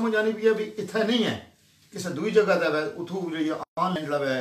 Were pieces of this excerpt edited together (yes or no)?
no